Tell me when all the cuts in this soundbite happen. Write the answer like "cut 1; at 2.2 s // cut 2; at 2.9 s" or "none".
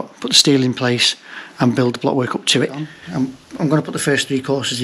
cut 1; at 3.0 s